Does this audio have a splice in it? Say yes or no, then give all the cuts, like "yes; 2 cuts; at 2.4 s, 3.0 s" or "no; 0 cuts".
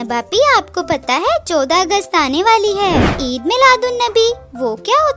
yes; 1 cut; at 3.0 s